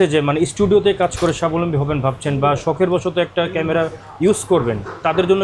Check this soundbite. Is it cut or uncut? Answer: uncut